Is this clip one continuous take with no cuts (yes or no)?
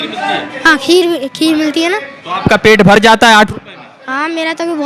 yes